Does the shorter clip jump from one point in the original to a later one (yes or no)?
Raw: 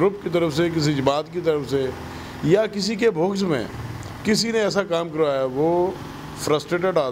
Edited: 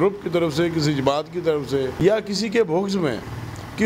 yes